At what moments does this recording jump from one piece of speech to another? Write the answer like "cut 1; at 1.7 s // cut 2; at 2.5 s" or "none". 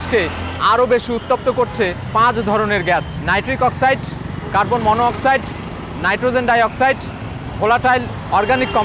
cut 1; at 2.0 s // cut 2; at 3.1 s